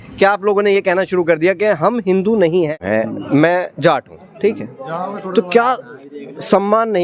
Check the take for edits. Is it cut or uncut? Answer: cut